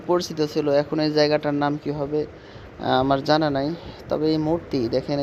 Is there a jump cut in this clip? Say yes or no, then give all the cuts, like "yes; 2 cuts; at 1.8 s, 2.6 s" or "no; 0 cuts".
no; 0 cuts